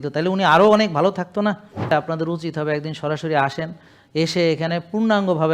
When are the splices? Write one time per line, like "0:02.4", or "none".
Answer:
0:01.9